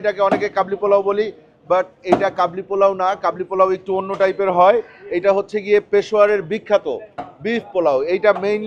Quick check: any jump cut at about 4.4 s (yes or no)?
no